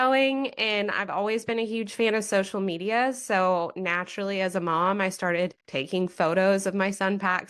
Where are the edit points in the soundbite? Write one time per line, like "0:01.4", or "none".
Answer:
0:05.7

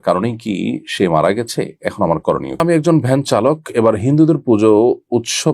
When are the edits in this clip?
0:02.7

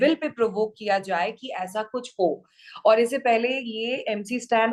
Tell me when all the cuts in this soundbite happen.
none

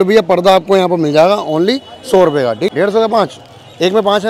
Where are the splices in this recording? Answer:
0:02.7

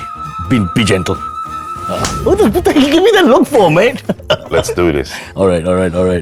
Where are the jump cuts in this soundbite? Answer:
none

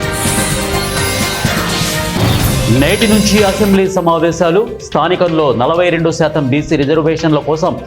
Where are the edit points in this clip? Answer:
none

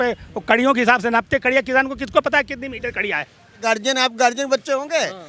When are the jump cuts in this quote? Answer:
0:03.6

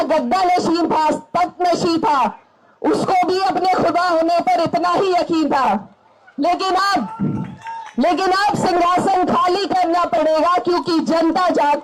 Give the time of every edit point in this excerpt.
none

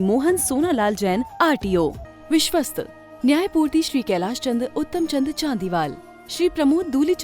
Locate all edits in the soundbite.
0:02.1

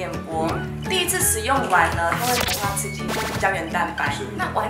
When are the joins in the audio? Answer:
none

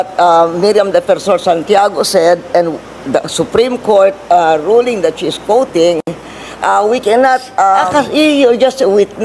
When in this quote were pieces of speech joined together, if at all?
0:07.8

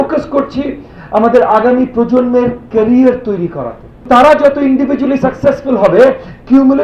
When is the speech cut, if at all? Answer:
0:04.0

